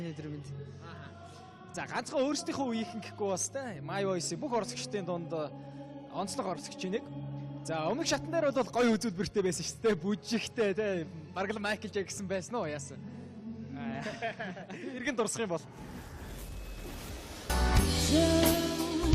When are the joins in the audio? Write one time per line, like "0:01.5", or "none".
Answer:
0:09.0